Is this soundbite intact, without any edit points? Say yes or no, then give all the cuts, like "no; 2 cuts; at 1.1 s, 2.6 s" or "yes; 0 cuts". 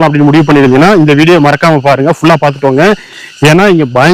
yes; 0 cuts